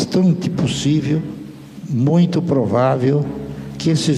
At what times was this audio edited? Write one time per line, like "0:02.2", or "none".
none